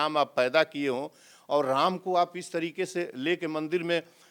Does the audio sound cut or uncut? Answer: uncut